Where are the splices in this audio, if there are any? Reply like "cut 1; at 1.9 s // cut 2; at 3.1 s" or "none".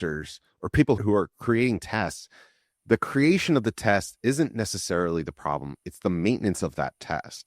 cut 1; at 1.0 s